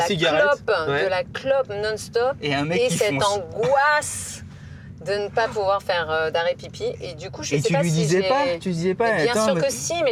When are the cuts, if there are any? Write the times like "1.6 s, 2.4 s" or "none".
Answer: none